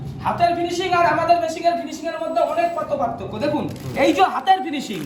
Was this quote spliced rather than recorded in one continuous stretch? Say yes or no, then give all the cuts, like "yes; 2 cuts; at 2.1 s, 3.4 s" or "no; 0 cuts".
no; 0 cuts